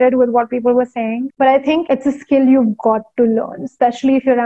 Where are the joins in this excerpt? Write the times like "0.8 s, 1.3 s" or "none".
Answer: none